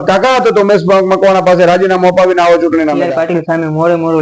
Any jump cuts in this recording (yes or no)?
yes